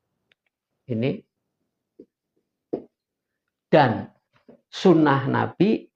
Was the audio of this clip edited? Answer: no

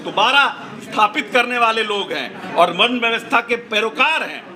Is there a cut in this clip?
no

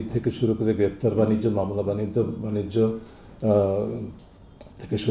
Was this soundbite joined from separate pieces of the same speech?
no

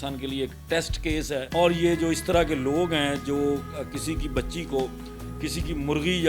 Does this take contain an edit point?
yes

